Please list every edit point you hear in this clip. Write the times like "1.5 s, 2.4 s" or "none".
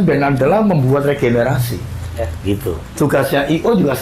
2.9 s